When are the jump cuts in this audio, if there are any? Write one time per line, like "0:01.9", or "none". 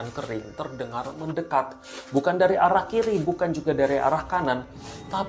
none